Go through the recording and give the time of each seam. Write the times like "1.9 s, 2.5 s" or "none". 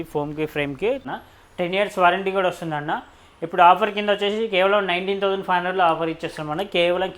1.1 s